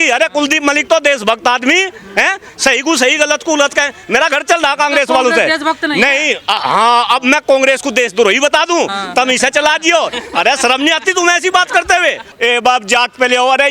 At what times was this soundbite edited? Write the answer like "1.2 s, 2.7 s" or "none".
12.3 s